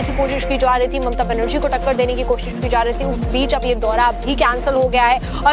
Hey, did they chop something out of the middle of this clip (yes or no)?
yes